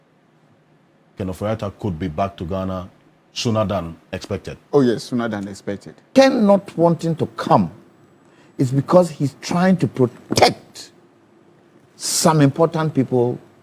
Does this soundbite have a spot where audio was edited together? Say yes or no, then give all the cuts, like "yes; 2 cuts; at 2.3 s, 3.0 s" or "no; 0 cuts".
yes; 1 cut; at 6.0 s